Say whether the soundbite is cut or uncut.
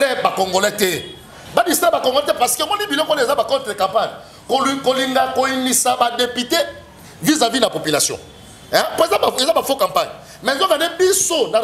uncut